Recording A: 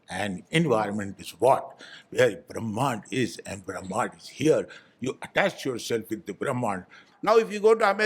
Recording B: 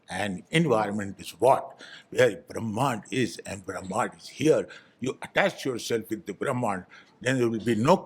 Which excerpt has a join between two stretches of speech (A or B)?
A